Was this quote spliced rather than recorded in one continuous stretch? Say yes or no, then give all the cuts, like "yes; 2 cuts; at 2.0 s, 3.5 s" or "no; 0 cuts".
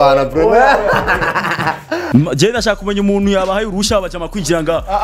yes; 1 cut; at 2.0 s